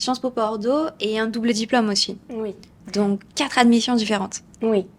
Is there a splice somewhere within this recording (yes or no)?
no